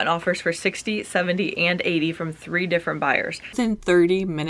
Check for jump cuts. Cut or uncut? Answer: cut